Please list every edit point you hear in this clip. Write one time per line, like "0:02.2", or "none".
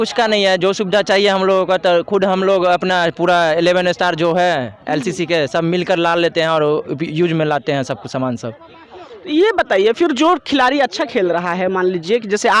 none

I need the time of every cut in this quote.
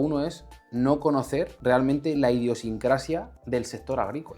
0:01.5
0:03.3

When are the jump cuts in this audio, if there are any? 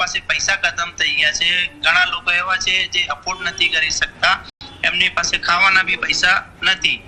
none

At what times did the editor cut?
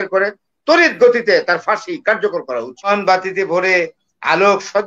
0:02.9

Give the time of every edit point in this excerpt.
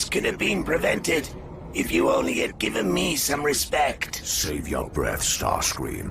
0:04.1

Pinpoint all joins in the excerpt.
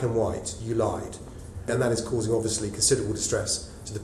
0:01.7

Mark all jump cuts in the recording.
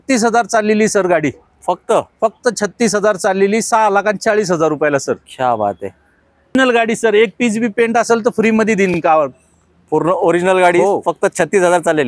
none

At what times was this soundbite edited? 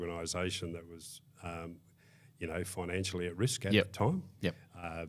none

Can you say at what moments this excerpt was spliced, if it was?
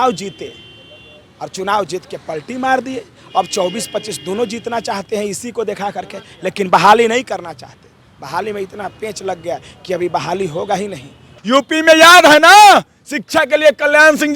0:11.3

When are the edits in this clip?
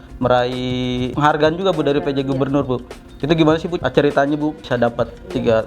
0:01.1
0:03.8
0:04.6

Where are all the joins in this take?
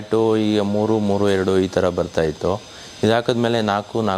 none

